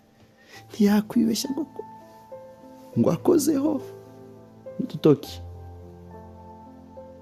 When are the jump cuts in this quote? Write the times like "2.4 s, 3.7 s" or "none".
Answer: none